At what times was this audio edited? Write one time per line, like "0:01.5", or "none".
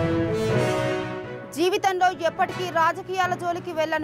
0:00.9